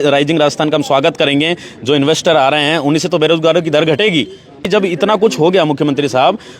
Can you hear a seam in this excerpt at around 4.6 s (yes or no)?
yes